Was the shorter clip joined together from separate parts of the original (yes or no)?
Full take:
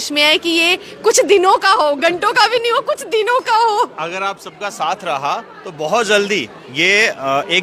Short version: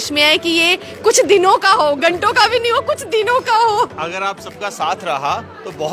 no